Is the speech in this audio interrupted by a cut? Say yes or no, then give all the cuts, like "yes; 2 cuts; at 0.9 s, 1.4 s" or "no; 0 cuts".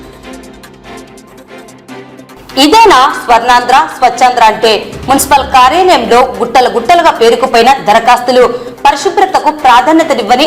yes; 2 cuts; at 0.9 s, 1.6 s